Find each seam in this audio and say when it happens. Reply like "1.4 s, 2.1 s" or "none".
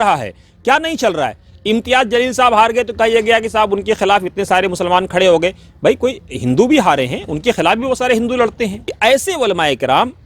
8.8 s